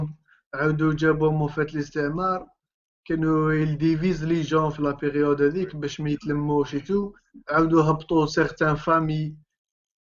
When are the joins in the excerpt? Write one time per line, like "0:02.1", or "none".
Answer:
none